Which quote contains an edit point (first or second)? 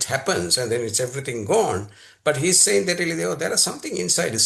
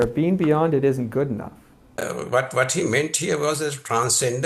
second